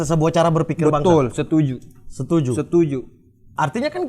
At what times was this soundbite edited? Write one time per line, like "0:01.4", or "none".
none